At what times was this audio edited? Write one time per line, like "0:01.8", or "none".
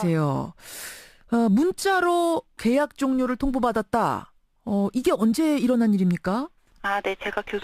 0:06.6

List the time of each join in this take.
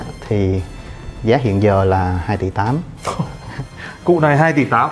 none

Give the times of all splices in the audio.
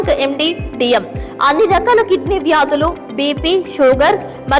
none

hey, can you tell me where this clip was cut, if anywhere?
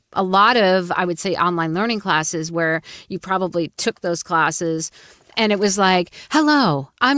none

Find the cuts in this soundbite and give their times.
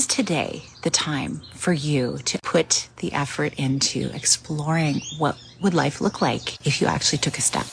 0:02.4
0:06.5

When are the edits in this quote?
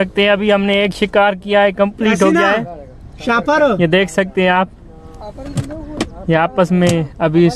none

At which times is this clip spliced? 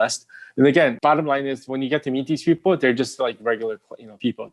0:01.0

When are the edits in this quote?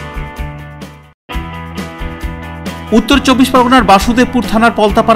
0:00.9

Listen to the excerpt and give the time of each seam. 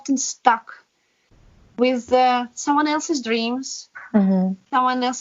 none

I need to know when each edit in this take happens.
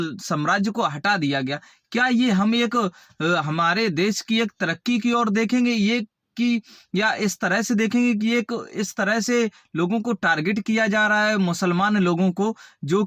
none

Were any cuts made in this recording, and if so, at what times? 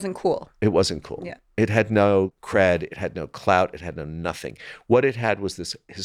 0:02.4

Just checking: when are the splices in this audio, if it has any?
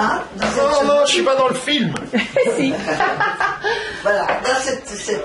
none

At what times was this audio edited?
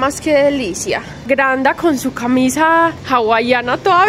0:01.2
0:03.0

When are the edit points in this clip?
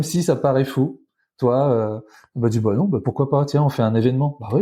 none

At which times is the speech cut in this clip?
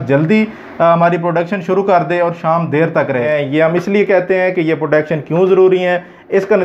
0:03.3

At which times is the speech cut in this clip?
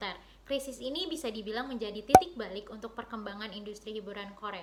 none

